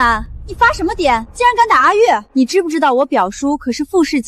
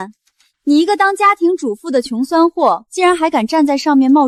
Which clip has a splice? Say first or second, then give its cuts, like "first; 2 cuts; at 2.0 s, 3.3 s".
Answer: first; 2 cuts; at 1.3 s, 2.3 s